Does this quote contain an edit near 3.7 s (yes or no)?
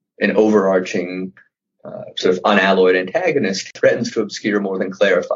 yes